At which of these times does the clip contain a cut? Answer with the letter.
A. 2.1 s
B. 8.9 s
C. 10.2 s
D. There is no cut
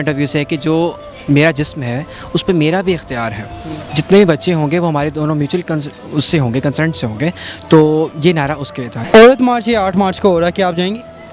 B